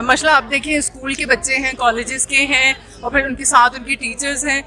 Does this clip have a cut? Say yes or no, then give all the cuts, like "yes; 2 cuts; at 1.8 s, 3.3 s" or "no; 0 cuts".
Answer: no; 0 cuts